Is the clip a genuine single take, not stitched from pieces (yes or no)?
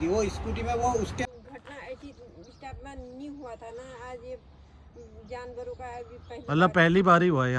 no